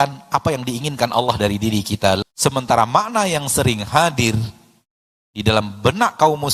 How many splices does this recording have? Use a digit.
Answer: 1